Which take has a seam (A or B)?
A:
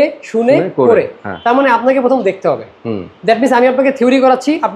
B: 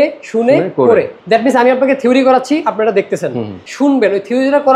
B